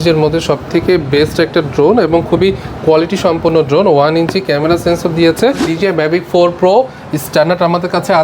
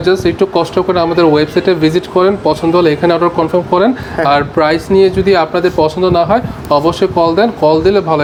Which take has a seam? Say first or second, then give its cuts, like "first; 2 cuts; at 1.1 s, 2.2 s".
first; 1 cut; at 5.7 s